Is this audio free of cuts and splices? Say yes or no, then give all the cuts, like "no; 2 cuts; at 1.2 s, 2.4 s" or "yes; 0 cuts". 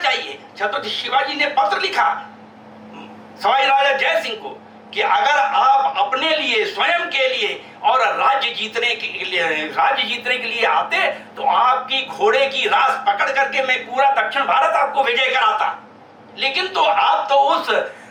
yes; 0 cuts